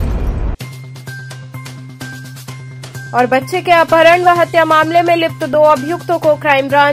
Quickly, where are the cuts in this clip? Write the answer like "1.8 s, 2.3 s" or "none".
2.6 s